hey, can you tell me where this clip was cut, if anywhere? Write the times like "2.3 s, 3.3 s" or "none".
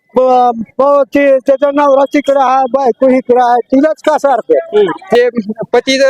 5.2 s